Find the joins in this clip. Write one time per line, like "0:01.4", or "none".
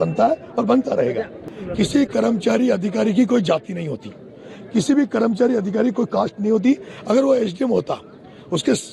0:01.4